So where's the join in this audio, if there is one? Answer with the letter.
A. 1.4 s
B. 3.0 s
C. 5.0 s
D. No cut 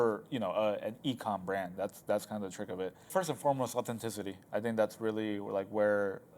B